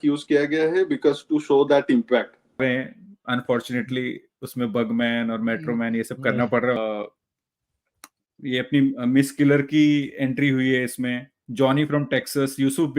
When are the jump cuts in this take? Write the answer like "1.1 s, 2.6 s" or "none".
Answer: 2.6 s, 6.8 s